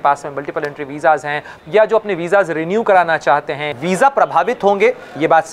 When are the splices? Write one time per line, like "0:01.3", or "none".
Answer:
0:03.7